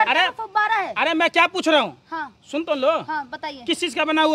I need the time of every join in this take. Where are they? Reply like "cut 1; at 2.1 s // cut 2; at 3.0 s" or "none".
none